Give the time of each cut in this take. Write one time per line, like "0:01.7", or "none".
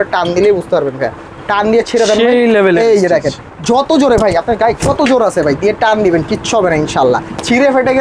none